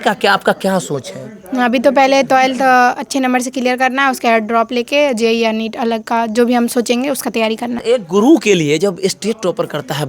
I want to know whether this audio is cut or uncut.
cut